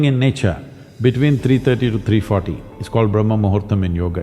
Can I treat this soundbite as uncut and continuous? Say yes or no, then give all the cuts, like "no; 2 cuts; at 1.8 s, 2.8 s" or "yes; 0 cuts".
yes; 0 cuts